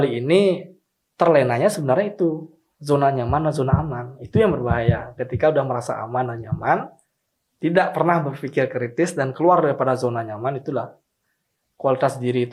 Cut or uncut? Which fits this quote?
uncut